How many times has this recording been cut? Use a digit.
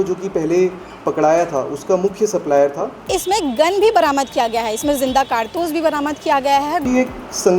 2